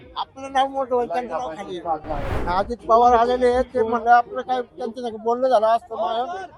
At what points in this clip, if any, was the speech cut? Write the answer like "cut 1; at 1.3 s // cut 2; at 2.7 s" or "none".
cut 1; at 2.3 s

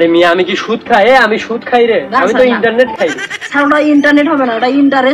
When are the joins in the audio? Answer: none

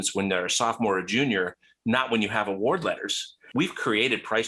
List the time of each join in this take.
cut 1; at 3.5 s

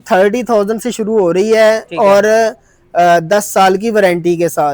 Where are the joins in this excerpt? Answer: none

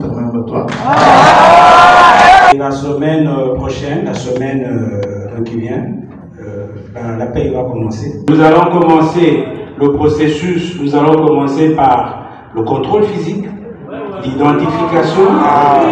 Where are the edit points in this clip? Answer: cut 1; at 2.5 s // cut 2; at 8.2 s

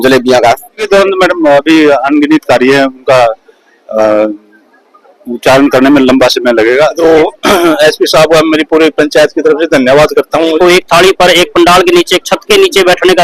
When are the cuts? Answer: cut 1; at 0.8 s // cut 2; at 7.0 s // cut 3; at 10.5 s

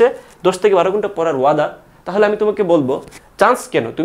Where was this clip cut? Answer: cut 1; at 3.1 s

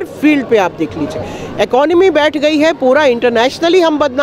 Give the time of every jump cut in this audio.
none

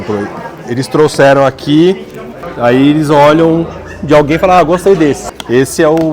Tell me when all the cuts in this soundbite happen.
cut 1; at 2.5 s // cut 2; at 5.2 s

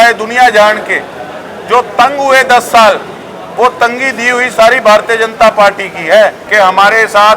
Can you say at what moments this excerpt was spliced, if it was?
cut 1; at 6.4 s

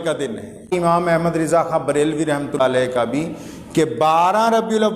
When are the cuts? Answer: cut 1; at 0.7 s // cut 2; at 2.6 s

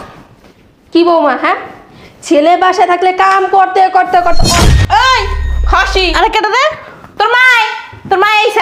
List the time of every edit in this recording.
cut 1; at 4.5 s

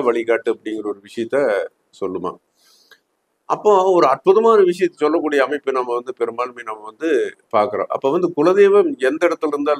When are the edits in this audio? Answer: none

